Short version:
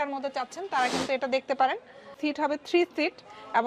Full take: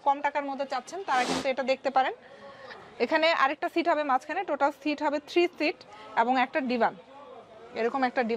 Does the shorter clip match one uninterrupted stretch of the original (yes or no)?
no